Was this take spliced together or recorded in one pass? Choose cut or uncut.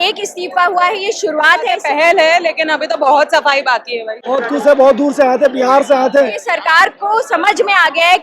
cut